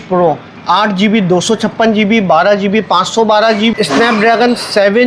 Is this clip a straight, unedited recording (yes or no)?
no